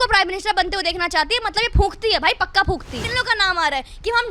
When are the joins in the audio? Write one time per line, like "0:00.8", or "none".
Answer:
0:03.0